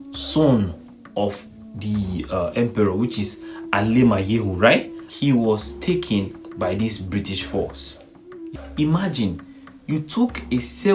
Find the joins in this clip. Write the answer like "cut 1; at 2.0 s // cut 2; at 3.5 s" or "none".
cut 1; at 8.5 s